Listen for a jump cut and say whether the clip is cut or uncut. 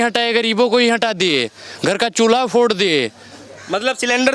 uncut